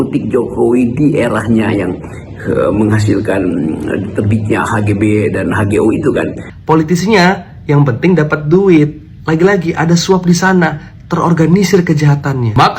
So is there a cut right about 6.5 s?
yes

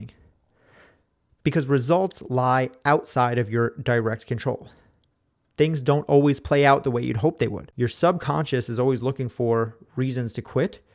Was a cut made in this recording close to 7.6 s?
yes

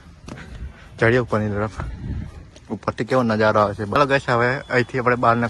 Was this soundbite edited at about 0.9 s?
no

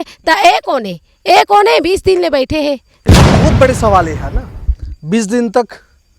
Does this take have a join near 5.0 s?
no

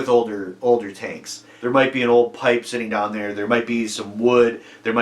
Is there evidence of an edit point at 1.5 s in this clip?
yes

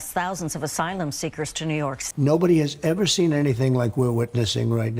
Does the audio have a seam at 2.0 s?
yes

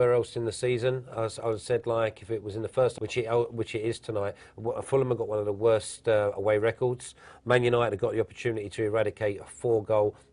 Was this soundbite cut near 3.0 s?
no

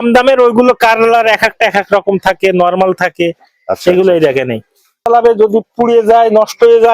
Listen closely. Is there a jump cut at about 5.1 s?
yes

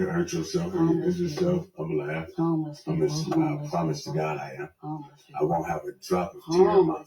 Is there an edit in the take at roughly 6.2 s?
yes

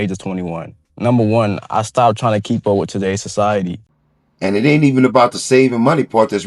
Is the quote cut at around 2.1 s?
no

